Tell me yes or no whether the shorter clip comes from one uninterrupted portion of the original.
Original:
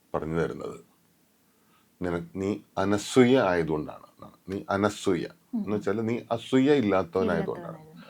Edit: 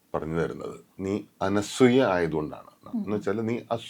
no